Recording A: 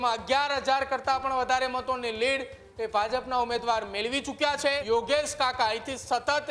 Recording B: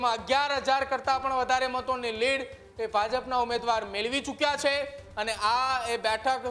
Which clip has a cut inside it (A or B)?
A